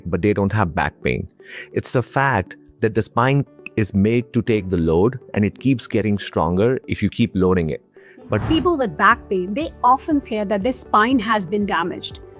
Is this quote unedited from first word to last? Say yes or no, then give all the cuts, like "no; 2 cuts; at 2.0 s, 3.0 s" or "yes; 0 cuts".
no; 1 cut; at 8.4 s